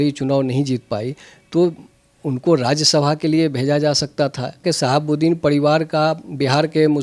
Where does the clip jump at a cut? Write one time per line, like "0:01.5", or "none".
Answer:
0:04.6